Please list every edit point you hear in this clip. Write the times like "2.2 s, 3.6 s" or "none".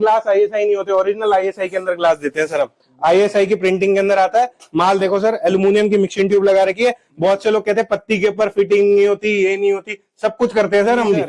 none